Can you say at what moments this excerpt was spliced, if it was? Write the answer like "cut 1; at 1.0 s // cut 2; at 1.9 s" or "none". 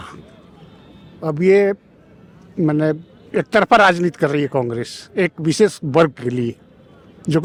none